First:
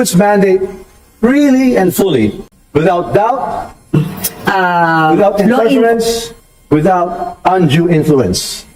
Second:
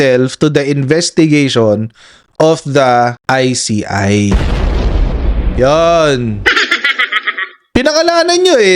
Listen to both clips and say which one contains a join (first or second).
second